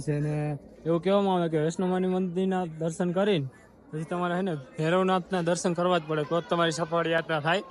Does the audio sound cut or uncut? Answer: uncut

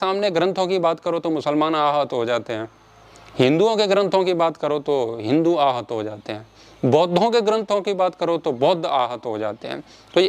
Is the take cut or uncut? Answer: uncut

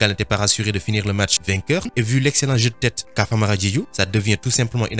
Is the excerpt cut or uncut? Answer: cut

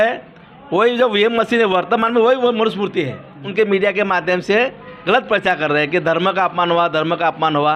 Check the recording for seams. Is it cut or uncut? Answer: cut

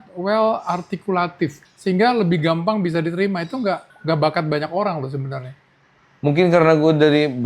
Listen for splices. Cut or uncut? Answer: cut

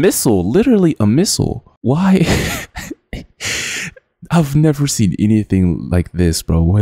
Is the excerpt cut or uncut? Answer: uncut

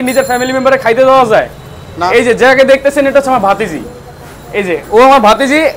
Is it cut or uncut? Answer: uncut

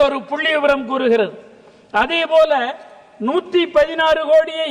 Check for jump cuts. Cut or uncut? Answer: uncut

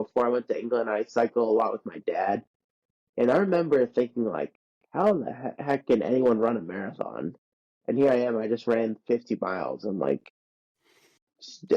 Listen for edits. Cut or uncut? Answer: uncut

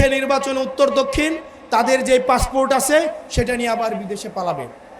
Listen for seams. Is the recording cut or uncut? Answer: uncut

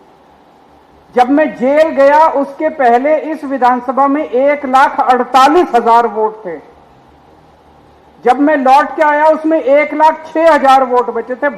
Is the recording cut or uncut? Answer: uncut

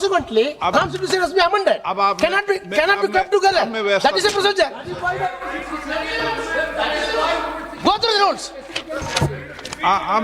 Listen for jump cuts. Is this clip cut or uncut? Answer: uncut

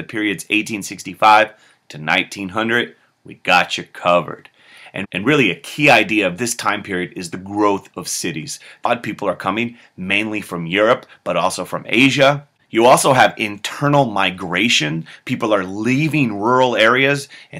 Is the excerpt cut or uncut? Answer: uncut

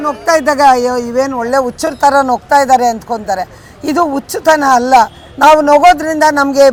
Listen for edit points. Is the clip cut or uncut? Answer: uncut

